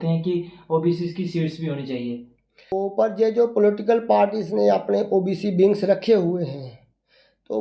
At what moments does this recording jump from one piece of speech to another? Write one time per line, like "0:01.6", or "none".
0:02.7